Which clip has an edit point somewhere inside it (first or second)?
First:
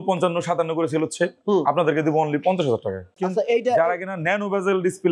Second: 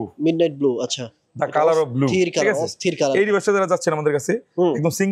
first